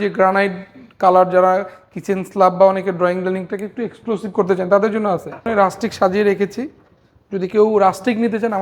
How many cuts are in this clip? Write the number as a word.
one